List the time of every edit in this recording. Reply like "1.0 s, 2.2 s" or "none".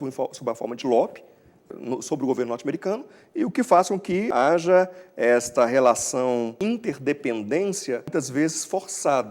1.6 s, 4.3 s, 6.5 s, 8.1 s